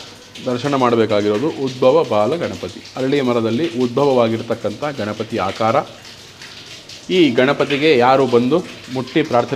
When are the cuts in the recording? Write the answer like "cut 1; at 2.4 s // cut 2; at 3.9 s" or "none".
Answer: none